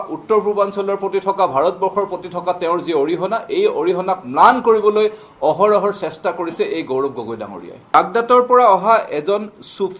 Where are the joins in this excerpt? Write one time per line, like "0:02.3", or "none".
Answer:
0:07.9